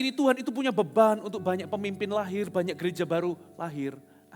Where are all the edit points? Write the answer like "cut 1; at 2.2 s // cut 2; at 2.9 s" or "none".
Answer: none